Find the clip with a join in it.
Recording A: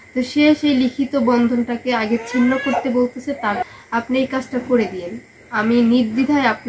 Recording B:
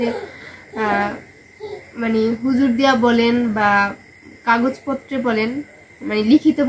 A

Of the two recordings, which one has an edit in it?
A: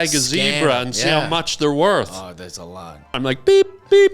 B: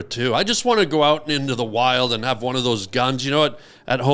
A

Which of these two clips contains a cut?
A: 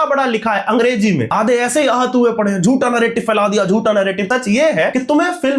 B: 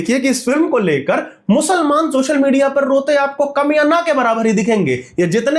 A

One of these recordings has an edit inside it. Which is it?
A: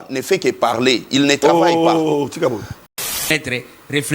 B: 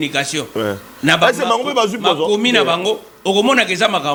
A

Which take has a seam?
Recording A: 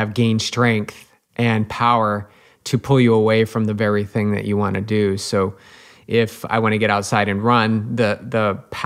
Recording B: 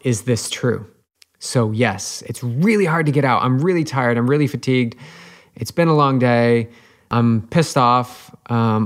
B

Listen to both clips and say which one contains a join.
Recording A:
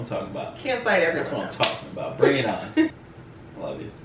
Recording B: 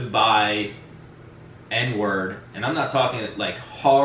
A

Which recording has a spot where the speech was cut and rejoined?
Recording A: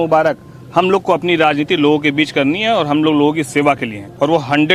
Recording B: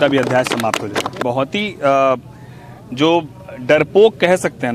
B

